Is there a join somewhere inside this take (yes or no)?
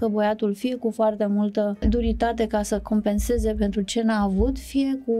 yes